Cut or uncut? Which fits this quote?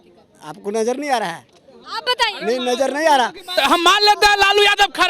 cut